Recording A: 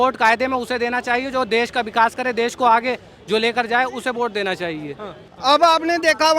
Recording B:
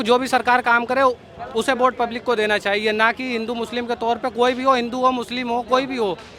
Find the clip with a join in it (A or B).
A